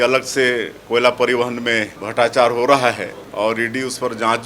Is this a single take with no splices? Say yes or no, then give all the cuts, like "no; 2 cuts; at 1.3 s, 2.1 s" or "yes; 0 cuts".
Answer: no; 2 cuts; at 2.0 s, 3.2 s